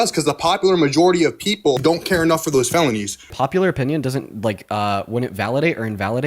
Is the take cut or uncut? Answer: cut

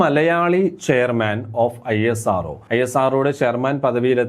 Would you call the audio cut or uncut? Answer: cut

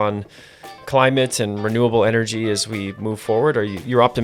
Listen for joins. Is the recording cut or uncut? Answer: uncut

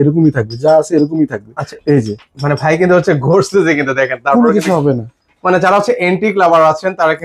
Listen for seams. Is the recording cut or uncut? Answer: uncut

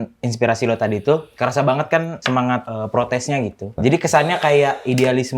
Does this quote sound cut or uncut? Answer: cut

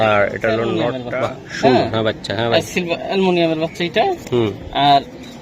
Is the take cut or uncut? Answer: cut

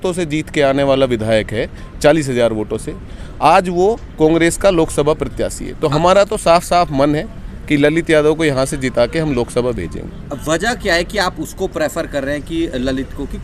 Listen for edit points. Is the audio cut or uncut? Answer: uncut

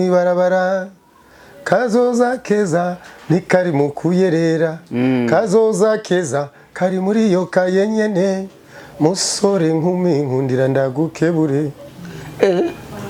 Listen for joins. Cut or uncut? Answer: uncut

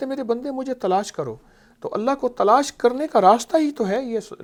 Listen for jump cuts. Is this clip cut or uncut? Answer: uncut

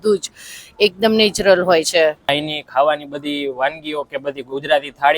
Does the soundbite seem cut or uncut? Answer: cut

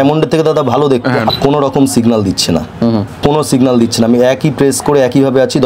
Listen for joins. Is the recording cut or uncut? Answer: cut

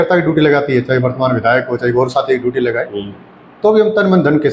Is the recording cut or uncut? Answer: uncut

